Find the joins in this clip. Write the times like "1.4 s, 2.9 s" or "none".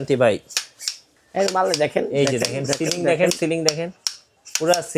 none